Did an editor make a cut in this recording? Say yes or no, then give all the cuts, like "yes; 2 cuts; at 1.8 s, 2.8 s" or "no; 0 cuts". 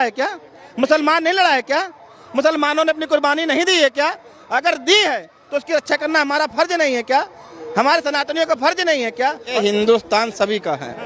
yes; 1 cut; at 9.6 s